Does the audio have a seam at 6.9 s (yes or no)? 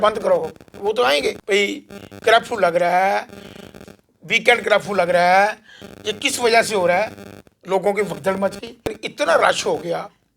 no